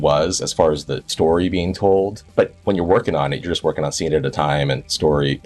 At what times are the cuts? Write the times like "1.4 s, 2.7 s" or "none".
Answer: 2.4 s